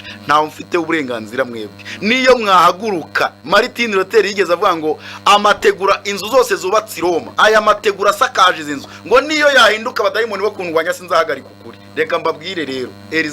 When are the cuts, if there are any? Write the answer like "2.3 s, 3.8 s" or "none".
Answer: 3.4 s, 7.3 s

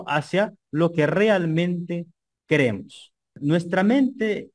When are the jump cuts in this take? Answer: 3.4 s

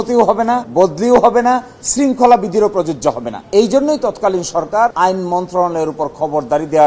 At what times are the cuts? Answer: none

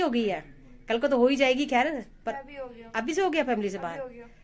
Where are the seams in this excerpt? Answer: none

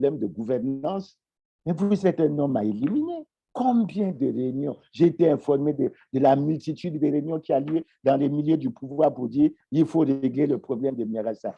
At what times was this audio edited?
none

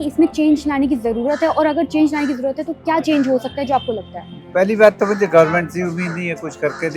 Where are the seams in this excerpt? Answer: none

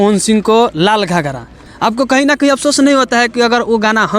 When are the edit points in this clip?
1.6 s

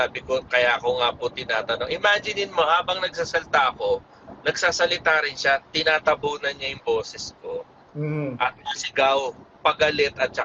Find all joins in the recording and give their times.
none

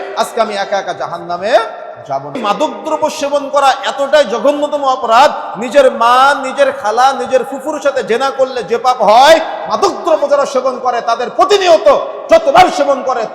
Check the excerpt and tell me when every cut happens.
2.4 s

